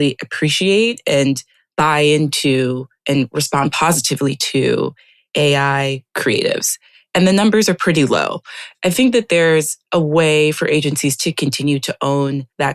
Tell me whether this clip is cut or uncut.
uncut